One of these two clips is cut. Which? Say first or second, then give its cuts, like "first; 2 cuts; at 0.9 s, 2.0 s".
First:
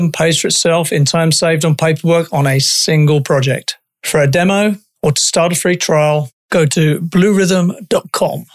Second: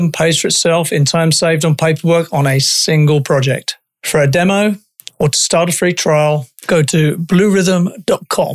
first; 1 cut; at 4.9 s